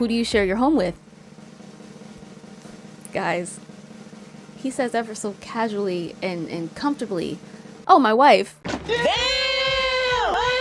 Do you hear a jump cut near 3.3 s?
no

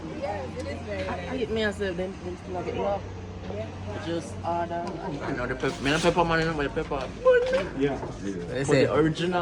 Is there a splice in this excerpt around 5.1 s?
yes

